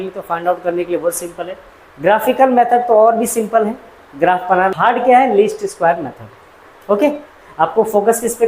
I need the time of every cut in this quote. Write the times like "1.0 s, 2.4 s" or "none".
4.7 s